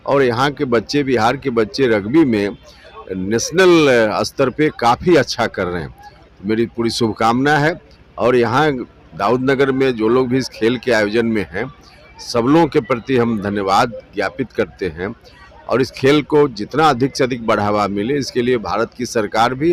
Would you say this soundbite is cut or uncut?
uncut